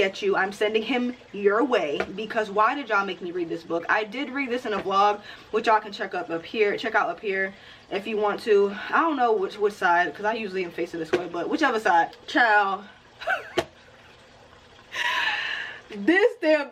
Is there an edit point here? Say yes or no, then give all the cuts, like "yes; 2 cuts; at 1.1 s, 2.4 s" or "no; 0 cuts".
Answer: no; 0 cuts